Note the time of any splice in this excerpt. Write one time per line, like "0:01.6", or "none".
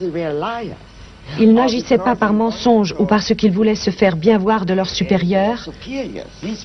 0:05.6